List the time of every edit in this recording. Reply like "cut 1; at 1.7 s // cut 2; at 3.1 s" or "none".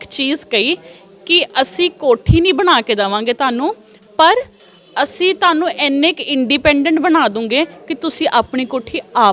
none